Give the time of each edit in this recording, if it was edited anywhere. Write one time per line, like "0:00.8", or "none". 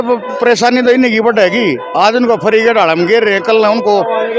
none

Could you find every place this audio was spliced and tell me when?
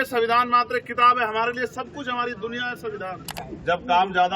0:03.4

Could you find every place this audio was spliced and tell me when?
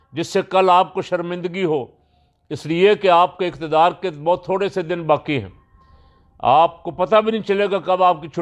none

